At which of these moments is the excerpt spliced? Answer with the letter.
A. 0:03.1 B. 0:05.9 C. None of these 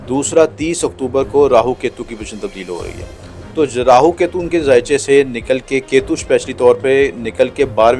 C